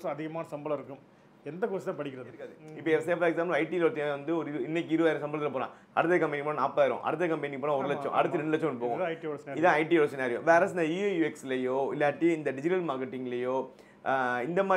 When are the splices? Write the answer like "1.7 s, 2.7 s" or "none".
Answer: 2.7 s